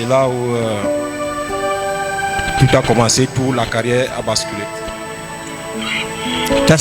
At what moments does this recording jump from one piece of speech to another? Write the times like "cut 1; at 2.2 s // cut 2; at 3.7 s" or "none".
none